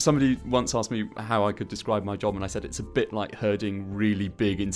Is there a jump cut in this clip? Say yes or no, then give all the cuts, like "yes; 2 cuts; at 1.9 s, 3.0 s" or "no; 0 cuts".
yes; 1 cut; at 1.2 s